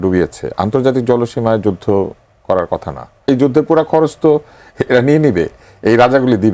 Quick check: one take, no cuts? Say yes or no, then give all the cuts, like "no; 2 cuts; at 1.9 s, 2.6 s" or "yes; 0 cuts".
no; 1 cut; at 3.3 s